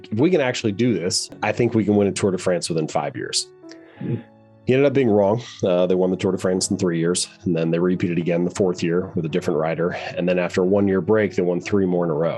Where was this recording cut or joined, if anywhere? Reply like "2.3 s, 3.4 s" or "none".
1.4 s